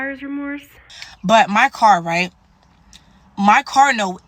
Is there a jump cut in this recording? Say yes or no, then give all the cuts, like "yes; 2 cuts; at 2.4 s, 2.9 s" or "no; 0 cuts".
yes; 1 cut; at 0.9 s